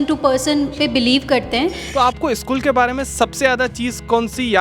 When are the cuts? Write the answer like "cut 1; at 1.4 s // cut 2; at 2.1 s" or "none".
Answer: cut 1; at 1.8 s

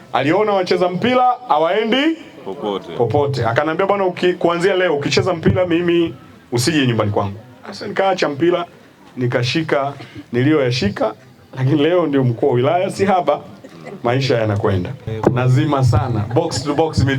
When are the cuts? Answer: cut 1; at 15.0 s

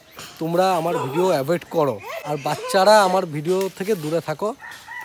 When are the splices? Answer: cut 1; at 2.1 s

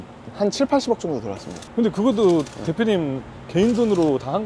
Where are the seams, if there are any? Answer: none

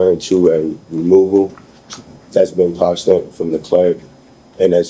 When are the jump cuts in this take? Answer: none

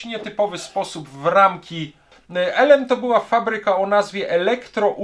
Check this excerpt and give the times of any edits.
cut 1; at 2.2 s

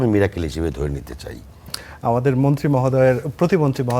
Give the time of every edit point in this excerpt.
cut 1; at 1.8 s

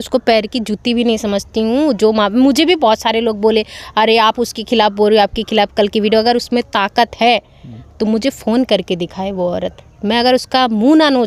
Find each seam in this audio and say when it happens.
none

